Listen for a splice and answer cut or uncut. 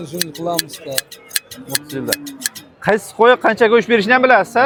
uncut